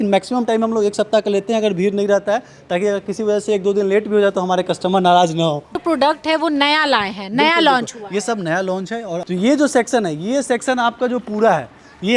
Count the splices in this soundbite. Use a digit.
2